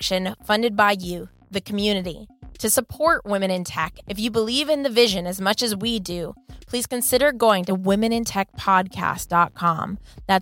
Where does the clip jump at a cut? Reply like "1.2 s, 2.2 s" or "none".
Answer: none